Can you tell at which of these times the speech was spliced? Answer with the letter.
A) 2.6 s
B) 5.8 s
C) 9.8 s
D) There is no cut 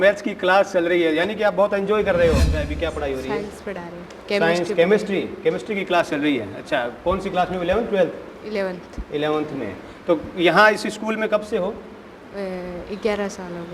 A